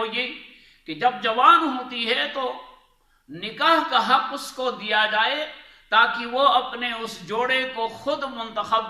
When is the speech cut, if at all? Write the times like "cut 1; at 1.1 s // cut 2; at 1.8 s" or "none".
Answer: none